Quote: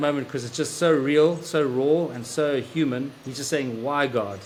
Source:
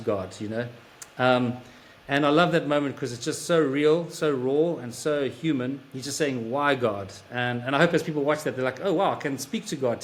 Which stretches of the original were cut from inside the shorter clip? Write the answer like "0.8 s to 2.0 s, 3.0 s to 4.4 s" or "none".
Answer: none